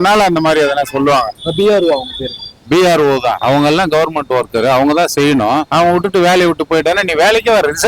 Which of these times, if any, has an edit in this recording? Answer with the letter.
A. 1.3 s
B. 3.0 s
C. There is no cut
A